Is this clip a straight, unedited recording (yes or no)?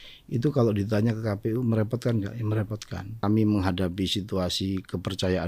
no